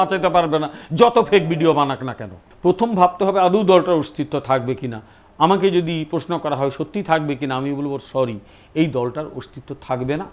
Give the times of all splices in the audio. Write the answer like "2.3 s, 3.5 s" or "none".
2.5 s